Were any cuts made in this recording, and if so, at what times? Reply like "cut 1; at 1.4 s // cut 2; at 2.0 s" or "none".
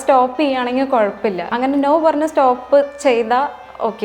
cut 1; at 1.5 s